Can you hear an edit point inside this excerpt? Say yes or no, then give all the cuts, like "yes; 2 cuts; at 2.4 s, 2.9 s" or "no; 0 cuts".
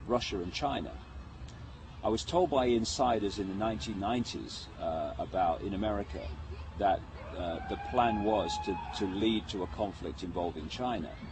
yes; 1 cut; at 4.5 s